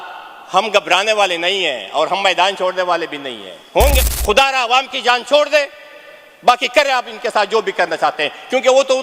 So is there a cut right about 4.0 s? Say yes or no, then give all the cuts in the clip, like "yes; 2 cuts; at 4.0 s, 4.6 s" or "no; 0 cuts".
yes; 1 cut; at 4.0 s